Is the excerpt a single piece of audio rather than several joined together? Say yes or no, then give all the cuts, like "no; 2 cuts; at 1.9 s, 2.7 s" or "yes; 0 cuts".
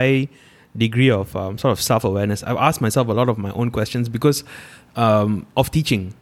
yes; 0 cuts